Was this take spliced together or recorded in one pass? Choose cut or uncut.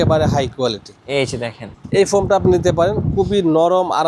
cut